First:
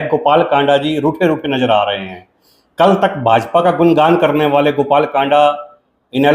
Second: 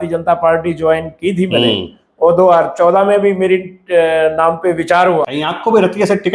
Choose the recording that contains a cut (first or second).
second